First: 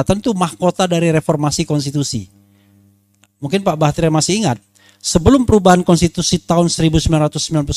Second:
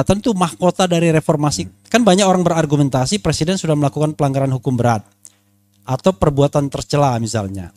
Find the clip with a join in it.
second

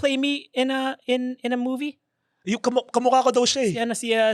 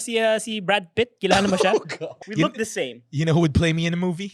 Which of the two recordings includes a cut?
second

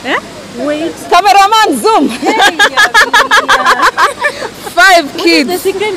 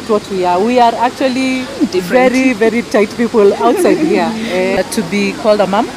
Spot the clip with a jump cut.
second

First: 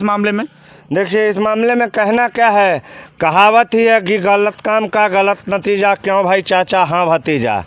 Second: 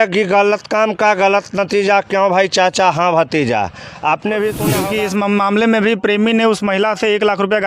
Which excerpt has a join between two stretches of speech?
second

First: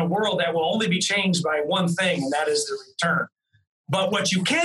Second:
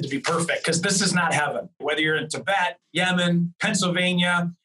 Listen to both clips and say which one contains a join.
second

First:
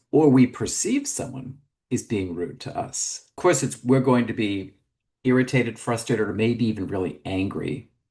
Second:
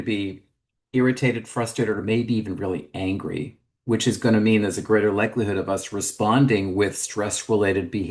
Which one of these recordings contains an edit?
first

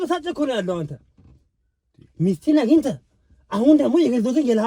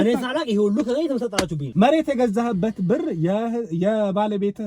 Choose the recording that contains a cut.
second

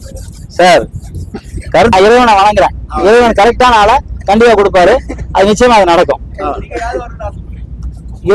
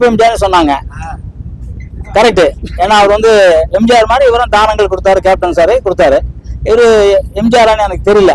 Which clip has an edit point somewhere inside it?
first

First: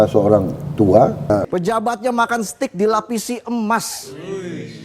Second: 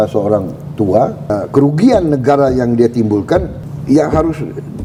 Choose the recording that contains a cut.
first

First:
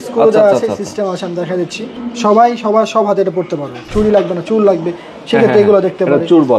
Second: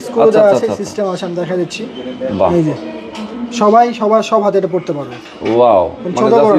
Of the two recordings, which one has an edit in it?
first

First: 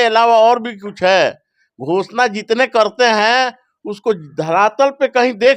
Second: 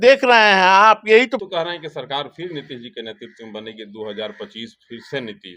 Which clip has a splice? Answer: second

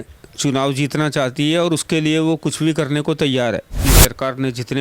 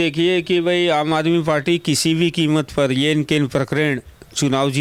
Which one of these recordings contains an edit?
first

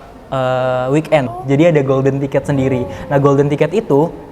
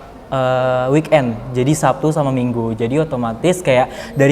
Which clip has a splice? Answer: first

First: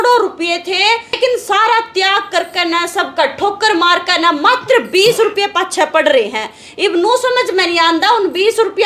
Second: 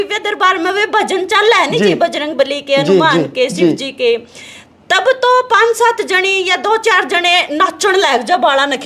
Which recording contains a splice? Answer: first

